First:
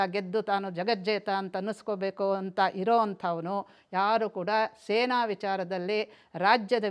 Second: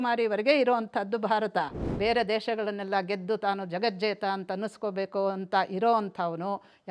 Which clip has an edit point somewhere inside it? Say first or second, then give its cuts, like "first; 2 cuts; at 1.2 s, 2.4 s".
second; 1 cut; at 1.8 s